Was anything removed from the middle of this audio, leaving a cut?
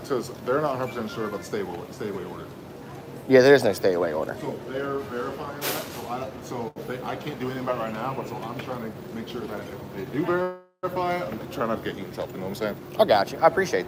no; 0 cuts

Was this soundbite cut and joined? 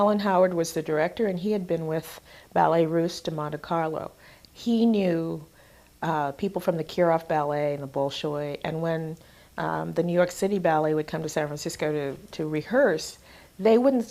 no; 0 cuts

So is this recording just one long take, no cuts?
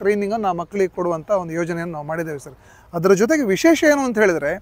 yes; 0 cuts

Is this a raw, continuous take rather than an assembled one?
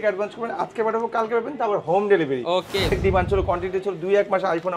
no; 1 cut; at 2.9 s

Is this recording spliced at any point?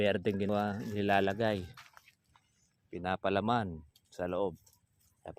no; 0 cuts

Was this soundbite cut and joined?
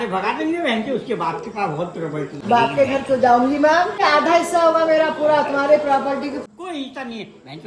yes; 3 cuts; at 2.4 s, 4.0 s, 6.4 s

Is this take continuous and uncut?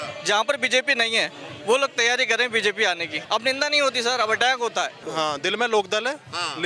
no; 2 cuts; at 3.2 s, 5.0 s

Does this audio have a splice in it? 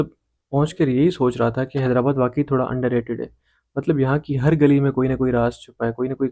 no; 0 cuts

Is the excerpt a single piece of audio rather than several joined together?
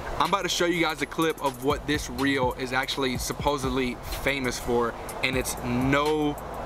yes; 0 cuts

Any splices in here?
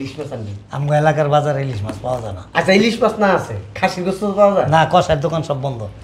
no; 0 cuts

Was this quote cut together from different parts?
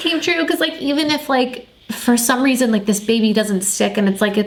no; 0 cuts

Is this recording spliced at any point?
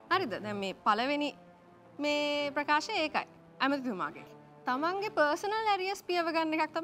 yes; 1 cut; at 4.3 s

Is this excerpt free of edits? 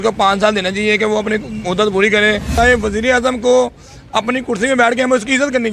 no; 1 cut; at 2.6 s

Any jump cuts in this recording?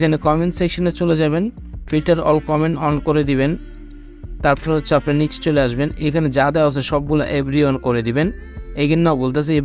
no; 0 cuts

